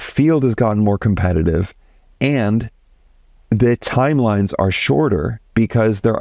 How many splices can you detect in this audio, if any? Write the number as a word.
zero